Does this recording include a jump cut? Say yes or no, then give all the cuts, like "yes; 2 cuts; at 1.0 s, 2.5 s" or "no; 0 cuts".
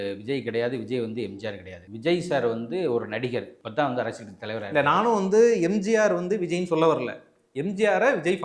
no; 0 cuts